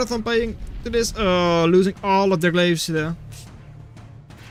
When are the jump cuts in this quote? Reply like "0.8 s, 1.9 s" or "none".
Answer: none